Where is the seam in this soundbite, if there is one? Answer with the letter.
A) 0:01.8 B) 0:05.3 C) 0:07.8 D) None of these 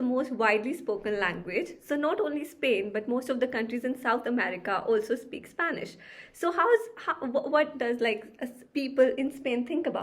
D